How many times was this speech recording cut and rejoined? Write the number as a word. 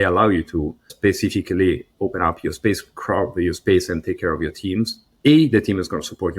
one